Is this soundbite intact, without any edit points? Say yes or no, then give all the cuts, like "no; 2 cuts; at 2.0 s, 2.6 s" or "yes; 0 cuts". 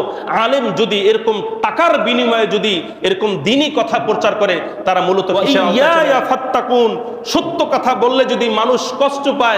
no; 1 cut; at 5.3 s